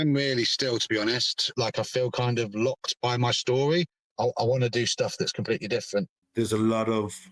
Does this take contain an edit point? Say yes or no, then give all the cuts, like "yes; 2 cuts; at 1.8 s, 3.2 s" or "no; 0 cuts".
yes; 3 cuts; at 1.5 s, 4.0 s, 6.2 s